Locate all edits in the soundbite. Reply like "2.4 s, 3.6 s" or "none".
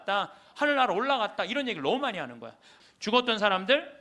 2.7 s